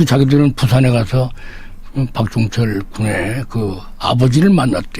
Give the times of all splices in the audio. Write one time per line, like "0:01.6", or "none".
0:03.8